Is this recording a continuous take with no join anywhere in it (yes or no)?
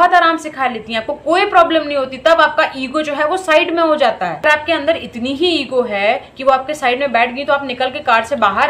yes